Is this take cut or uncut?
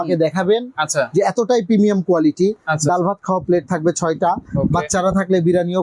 uncut